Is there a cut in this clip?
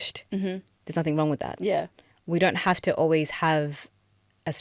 no; 0 cuts

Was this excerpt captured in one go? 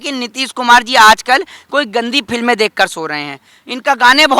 yes; 0 cuts

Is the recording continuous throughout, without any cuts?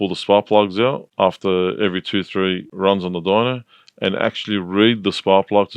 no; 2 cuts; at 1.0 s, 2.7 s

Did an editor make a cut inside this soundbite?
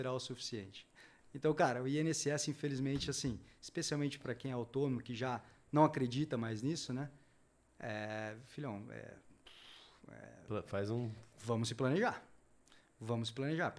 no; 0 cuts

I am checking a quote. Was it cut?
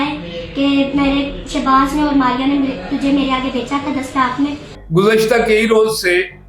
yes; 1 cut; at 4.8 s

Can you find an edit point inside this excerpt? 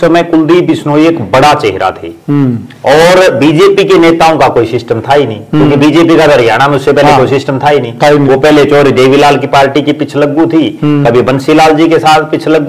no; 0 cuts

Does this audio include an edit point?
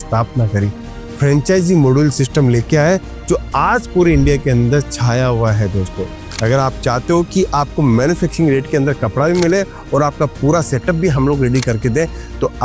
no; 0 cuts

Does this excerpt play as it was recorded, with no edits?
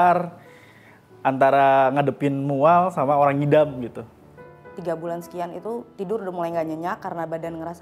no; 1 cut; at 4.4 s

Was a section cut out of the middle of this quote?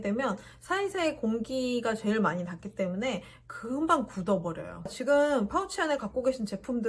yes; 1 cut; at 4.9 s

